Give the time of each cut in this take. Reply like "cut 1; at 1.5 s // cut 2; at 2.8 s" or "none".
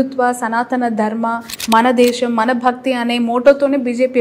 none